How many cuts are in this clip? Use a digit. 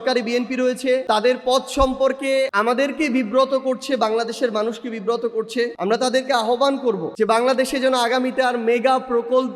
4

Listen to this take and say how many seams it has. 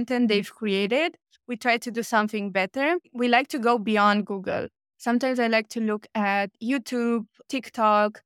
1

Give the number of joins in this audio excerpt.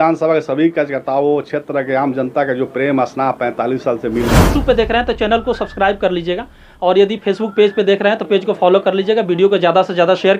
1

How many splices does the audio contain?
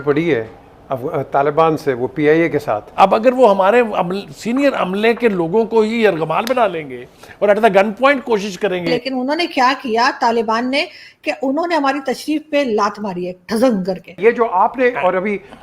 3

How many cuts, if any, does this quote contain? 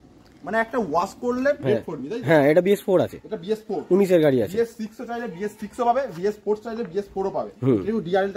1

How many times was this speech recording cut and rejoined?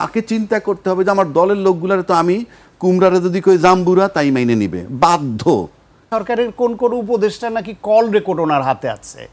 1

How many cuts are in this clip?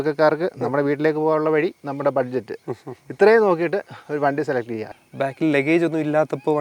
1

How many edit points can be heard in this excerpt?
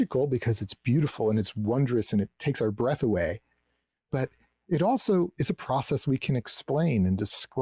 0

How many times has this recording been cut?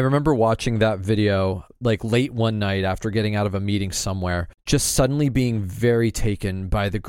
2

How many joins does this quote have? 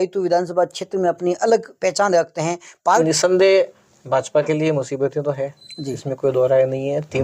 1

